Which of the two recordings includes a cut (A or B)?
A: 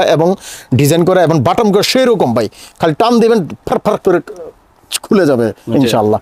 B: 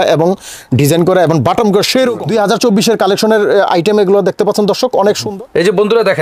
B